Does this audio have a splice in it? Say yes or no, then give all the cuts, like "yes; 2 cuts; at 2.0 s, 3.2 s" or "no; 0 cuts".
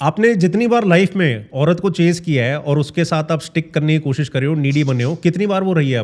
no; 0 cuts